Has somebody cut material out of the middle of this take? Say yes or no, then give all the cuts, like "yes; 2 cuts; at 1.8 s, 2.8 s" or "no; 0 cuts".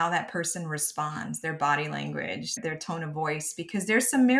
yes; 1 cut; at 2.6 s